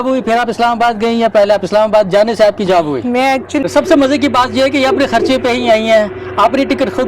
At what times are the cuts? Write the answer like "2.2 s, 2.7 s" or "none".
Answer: 3.6 s